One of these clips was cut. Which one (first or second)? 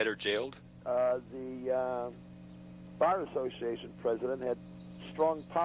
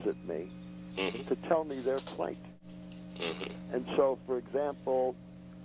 second